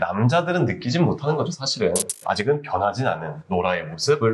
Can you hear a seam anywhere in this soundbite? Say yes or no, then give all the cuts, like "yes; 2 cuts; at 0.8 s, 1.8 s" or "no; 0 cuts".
yes; 1 cut; at 2.1 s